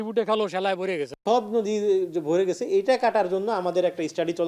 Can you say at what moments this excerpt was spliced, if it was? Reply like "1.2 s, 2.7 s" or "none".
1.1 s